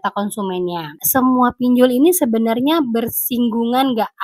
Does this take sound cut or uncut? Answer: cut